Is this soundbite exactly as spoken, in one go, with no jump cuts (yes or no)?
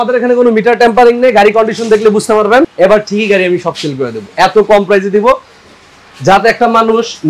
yes